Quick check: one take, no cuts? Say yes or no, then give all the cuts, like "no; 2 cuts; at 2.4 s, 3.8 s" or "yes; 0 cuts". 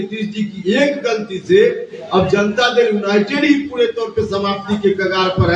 yes; 0 cuts